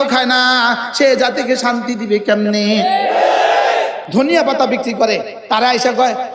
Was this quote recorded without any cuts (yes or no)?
no